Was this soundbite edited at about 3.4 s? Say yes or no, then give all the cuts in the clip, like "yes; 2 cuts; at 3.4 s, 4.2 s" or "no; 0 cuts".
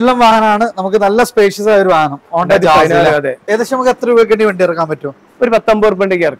yes; 1 cut; at 3.4 s